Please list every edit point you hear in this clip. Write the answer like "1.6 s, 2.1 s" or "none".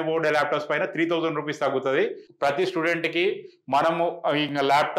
2.2 s